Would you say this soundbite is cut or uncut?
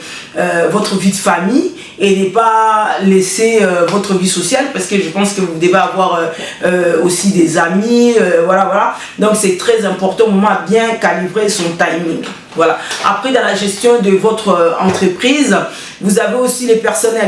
uncut